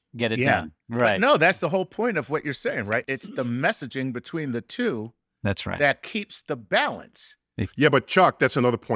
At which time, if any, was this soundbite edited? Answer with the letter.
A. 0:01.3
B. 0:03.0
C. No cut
B